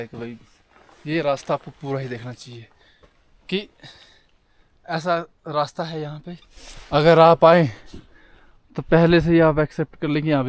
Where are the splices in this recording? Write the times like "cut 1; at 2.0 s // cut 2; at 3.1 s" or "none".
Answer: none